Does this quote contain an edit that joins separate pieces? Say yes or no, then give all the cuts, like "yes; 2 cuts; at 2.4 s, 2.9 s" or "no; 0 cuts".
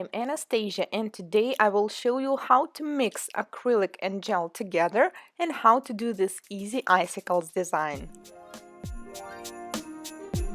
no; 0 cuts